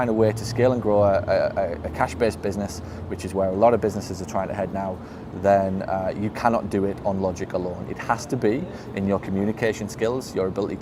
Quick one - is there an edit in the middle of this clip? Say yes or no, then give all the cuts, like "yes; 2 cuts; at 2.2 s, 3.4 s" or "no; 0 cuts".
no; 0 cuts